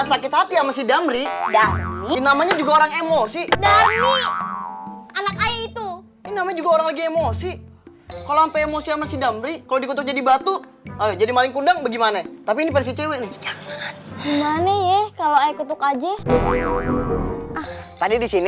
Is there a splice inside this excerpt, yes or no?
yes